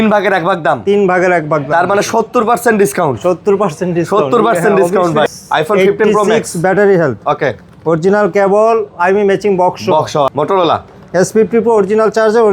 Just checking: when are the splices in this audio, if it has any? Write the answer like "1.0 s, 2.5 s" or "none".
5.3 s, 10.3 s

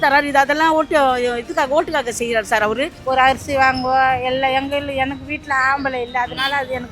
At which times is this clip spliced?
3.0 s

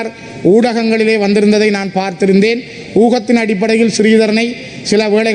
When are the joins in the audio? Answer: none

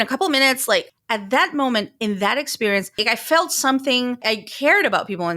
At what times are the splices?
1.0 s, 3.0 s, 4.2 s

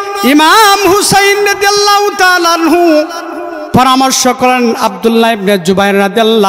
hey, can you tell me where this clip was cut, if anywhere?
none

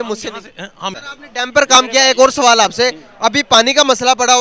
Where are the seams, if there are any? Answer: 1.0 s

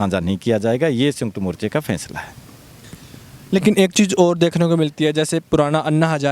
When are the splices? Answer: none

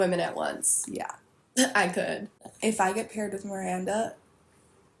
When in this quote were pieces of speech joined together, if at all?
2.4 s

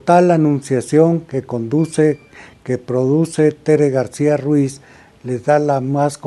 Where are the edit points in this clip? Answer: none

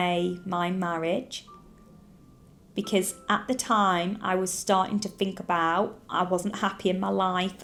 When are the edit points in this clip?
none

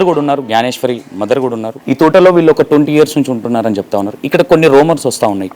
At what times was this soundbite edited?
1.8 s

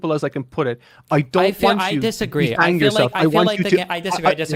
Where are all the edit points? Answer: none

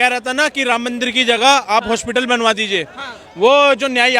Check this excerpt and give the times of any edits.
none

